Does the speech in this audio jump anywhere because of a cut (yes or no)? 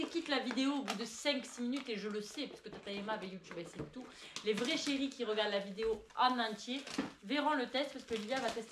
no